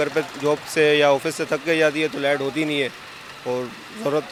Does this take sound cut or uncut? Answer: uncut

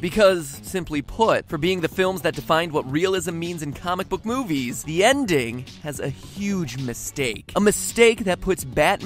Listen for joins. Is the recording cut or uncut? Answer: uncut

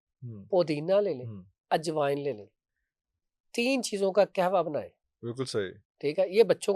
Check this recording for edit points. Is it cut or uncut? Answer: uncut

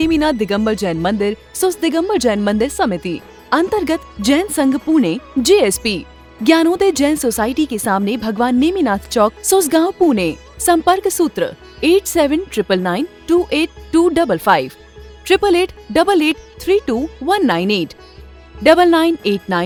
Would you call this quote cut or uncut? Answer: uncut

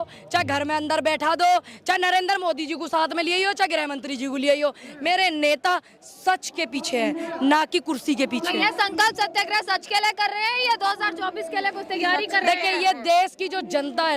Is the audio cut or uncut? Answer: uncut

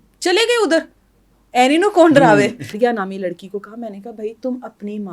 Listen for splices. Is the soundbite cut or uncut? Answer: cut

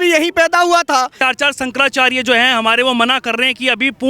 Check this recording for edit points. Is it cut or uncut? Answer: cut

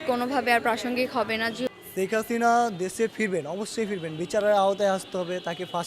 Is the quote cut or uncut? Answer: cut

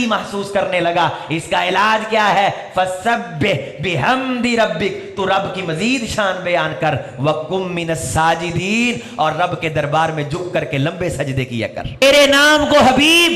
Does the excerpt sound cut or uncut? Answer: cut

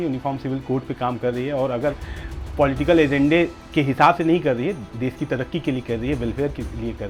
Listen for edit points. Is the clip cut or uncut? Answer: uncut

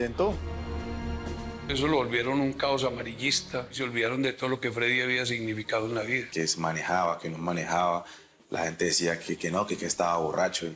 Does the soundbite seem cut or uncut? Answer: cut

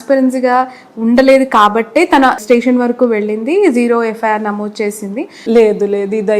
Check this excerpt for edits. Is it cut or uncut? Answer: cut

